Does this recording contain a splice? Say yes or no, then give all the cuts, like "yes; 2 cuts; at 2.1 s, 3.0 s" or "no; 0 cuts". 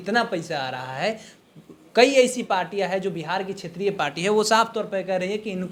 no; 0 cuts